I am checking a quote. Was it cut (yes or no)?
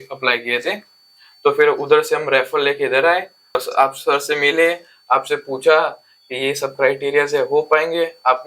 yes